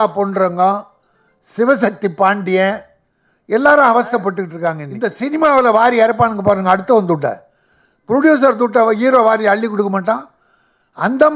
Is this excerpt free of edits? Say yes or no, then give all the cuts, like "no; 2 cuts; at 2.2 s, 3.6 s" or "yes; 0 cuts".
no; 1 cut; at 4.9 s